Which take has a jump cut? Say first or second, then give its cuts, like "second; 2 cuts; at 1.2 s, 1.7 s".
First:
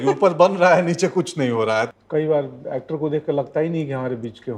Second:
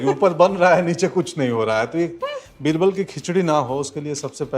first; 1 cut; at 1.9 s